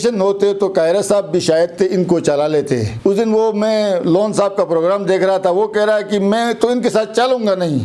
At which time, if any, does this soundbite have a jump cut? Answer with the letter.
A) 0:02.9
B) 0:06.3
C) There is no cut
A